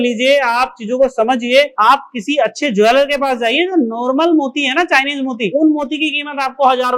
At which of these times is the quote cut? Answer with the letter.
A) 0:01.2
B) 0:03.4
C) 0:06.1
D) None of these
D